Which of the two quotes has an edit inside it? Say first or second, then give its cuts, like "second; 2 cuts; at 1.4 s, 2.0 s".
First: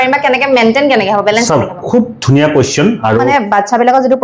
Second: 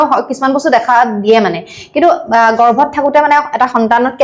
first; 1 cut; at 3.3 s